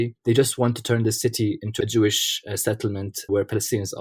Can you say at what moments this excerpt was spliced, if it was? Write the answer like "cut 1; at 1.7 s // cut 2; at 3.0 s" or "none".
cut 1; at 1.7 s // cut 2; at 3.3 s

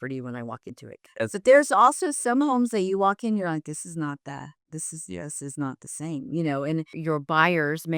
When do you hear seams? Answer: cut 1; at 7.0 s

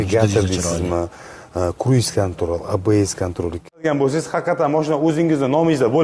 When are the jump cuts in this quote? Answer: cut 1; at 3.8 s

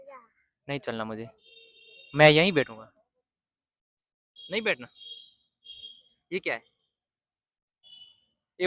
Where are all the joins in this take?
none

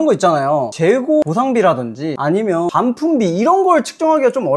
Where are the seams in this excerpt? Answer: cut 1; at 1.2 s // cut 2; at 2.4 s

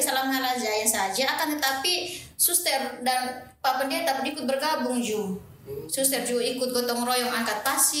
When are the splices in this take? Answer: none

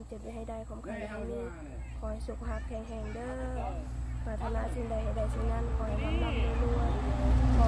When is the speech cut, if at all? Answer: none

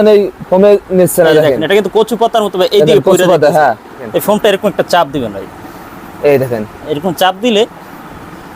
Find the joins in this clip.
cut 1; at 4.1 s

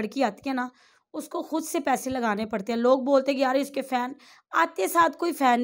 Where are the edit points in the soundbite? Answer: none

